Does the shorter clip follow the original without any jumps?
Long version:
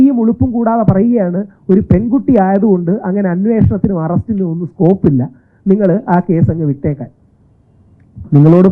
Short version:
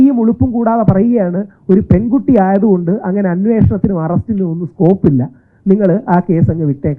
yes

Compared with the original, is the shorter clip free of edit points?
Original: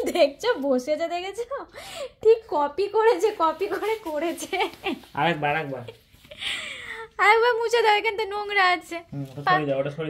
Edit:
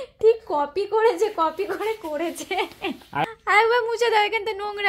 no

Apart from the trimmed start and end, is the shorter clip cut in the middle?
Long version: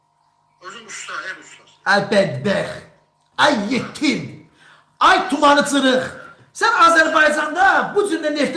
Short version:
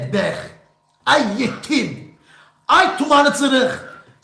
no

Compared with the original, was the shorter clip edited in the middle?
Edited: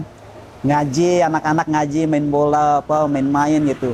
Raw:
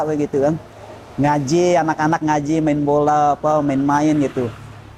no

